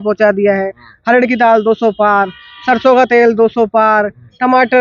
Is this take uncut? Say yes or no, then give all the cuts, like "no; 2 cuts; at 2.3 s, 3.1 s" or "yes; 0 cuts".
yes; 0 cuts